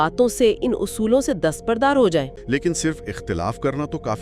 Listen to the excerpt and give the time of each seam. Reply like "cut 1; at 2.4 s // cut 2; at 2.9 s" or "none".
cut 1; at 2.4 s